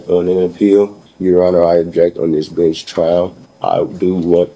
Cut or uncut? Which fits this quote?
cut